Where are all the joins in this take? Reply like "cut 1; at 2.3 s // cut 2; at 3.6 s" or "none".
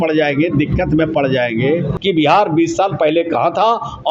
cut 1; at 1.9 s

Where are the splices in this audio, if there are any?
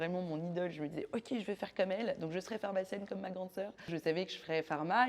cut 1; at 3.9 s

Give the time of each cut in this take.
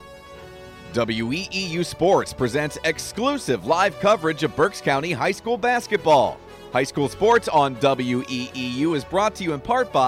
cut 1; at 0.9 s

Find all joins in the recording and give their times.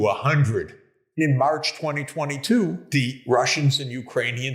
cut 1; at 1.2 s // cut 2; at 3.1 s

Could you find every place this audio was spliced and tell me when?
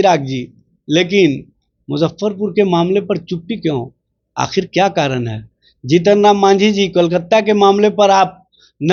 none

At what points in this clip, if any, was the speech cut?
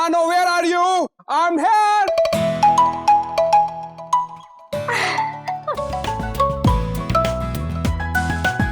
cut 1; at 6.0 s

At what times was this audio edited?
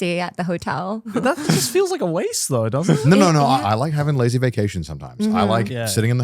cut 1; at 1.1 s // cut 2; at 3.6 s

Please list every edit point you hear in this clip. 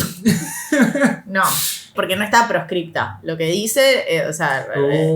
cut 1; at 1.9 s

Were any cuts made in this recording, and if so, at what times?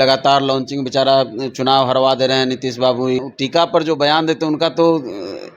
cut 1; at 3.3 s

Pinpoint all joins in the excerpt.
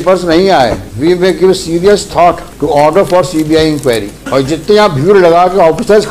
cut 1; at 0.9 s // cut 2; at 2.5 s // cut 3; at 4.2 s

